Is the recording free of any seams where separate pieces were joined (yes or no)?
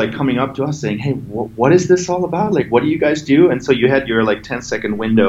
yes